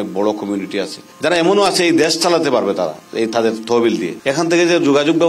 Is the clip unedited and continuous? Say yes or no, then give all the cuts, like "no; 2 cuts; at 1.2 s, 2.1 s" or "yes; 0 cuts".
no; 2 cuts; at 1.0 s, 4.1 s